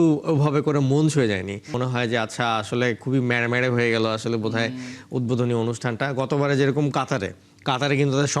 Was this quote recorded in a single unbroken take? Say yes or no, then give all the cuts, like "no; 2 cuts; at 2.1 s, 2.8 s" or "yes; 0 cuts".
no; 1 cut; at 1.7 s